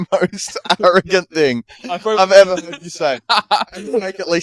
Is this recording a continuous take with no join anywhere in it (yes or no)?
yes